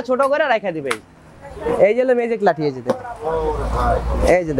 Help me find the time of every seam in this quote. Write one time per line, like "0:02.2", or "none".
0:01.8